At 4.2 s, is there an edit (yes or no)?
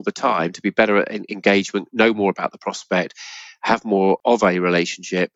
yes